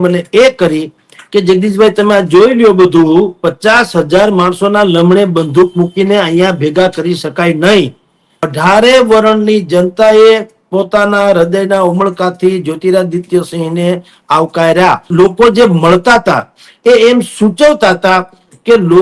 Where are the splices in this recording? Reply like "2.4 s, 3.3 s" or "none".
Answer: 8.5 s, 15.0 s

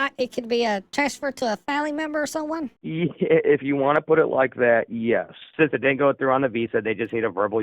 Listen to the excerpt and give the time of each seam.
5.5 s

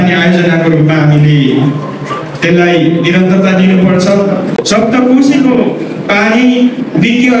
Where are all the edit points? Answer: 4.6 s

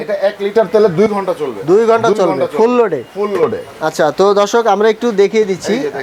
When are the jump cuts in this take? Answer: none

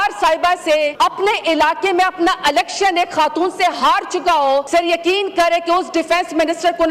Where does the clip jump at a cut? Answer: 0.9 s, 4.7 s

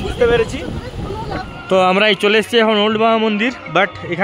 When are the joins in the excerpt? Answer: 1.6 s

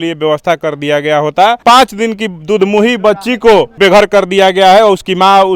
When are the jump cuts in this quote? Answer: 1.6 s, 3.7 s

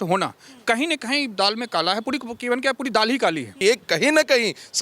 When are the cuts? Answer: 3.5 s

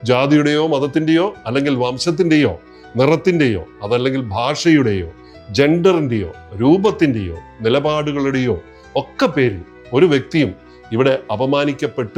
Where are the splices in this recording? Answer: none

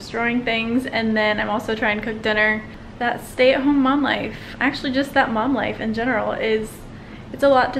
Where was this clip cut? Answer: 2.8 s

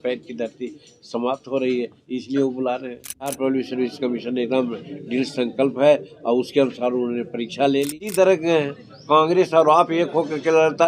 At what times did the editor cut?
3.4 s, 8.0 s

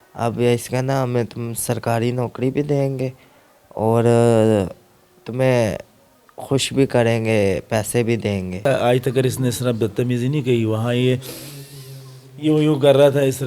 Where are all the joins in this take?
8.7 s

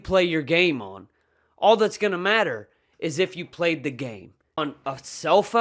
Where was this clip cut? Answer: 4.6 s

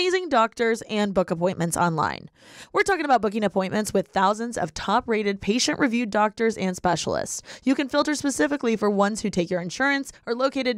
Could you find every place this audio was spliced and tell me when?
none

